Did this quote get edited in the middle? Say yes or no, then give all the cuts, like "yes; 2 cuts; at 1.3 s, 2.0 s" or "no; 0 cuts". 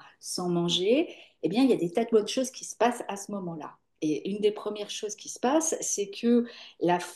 no; 0 cuts